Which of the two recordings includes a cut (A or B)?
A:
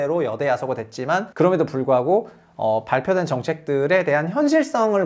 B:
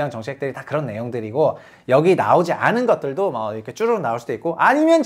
A